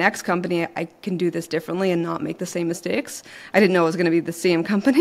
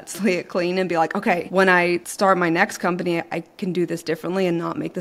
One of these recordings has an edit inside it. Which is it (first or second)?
second